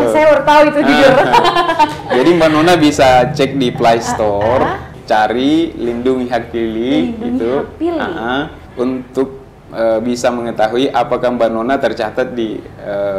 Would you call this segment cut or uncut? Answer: cut